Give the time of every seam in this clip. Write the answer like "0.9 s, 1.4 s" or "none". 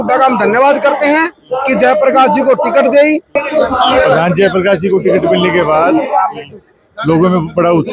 3.4 s